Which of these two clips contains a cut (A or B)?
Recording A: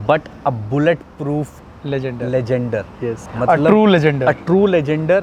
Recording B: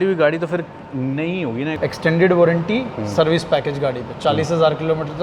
B